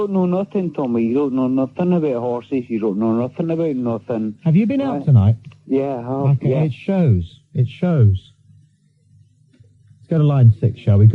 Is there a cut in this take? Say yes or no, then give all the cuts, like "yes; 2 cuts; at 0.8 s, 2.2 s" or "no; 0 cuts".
no; 0 cuts